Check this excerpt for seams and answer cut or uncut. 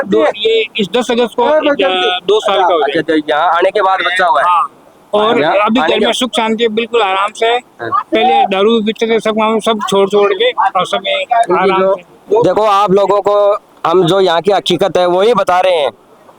uncut